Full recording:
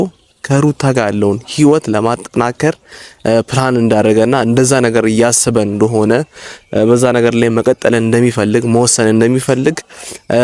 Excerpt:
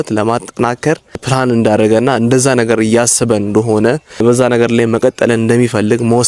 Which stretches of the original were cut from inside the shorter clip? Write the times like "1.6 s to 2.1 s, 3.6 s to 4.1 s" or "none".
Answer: 3.0 s to 3.5 s, 6.5 s to 6.8 s